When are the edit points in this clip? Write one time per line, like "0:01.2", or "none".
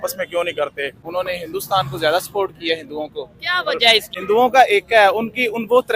0:00.9
0:04.1